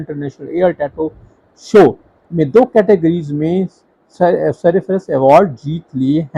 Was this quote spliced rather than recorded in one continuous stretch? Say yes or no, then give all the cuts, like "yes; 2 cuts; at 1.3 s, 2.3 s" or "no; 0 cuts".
yes; 1 cut; at 5.2 s